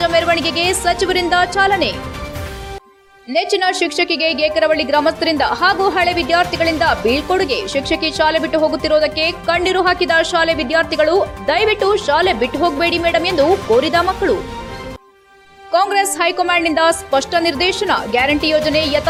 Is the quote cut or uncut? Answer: uncut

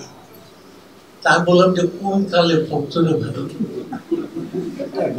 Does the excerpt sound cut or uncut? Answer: uncut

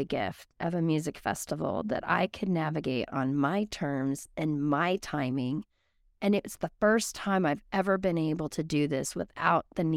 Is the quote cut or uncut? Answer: uncut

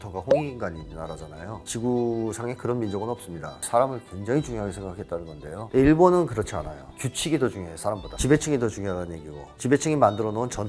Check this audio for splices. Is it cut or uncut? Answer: cut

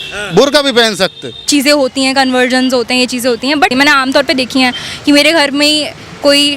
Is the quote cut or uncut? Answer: cut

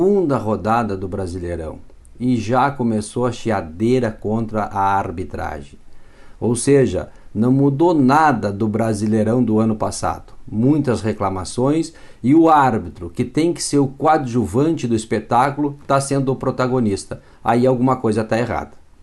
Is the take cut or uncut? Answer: uncut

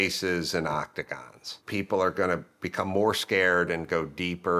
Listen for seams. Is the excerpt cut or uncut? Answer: cut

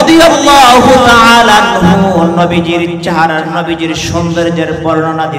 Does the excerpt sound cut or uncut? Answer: uncut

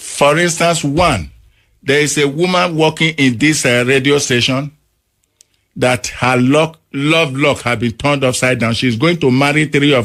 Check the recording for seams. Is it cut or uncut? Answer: uncut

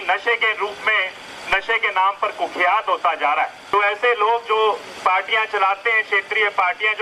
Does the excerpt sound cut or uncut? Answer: cut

